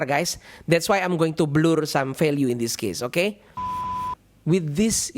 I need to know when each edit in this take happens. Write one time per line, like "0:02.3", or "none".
0:04.0